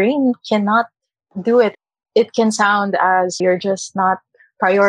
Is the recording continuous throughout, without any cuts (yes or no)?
no